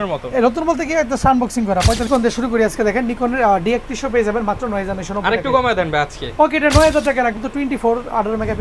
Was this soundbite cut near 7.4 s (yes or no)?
yes